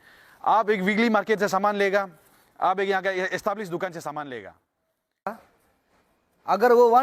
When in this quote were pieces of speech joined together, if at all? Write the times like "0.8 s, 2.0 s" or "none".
5.3 s